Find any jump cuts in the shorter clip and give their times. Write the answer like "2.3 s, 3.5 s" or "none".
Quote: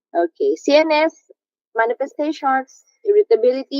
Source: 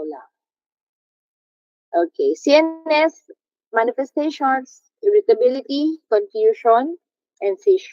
1.1 s